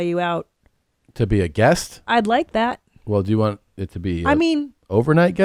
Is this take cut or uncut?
uncut